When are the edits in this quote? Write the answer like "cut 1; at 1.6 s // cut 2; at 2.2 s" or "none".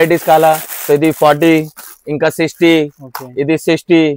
none